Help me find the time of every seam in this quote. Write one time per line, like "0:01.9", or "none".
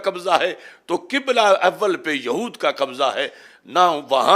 none